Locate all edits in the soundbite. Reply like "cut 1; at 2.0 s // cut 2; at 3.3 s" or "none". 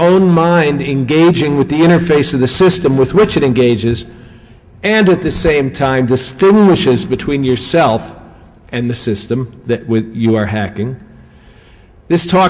cut 1; at 10.7 s

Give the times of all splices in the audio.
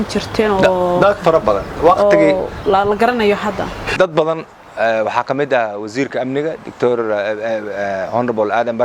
cut 1; at 3.8 s

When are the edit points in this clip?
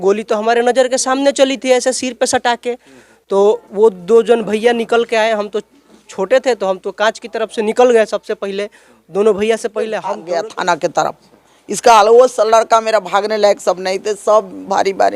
cut 1; at 10.1 s

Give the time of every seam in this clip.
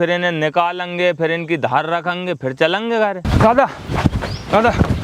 cut 1; at 3.2 s

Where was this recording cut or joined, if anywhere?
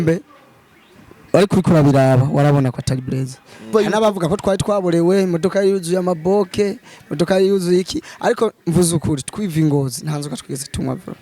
cut 1; at 3.7 s

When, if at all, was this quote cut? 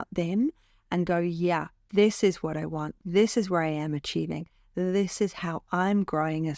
cut 1; at 2.9 s

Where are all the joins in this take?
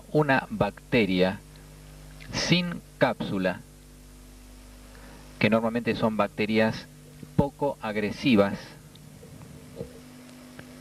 cut 1; at 5.3 s

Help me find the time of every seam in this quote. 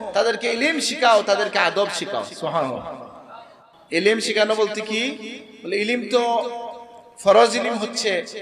none

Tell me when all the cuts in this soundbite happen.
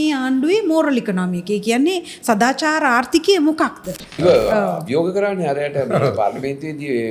cut 1; at 4.1 s

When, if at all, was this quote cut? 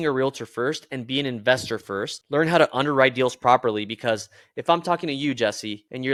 none

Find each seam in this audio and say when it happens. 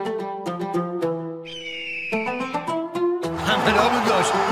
cut 1; at 1.2 s

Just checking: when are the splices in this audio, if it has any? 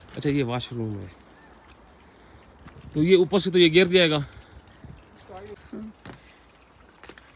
cut 1; at 5.6 s

